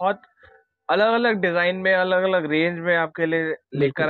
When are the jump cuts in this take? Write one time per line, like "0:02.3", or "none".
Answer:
none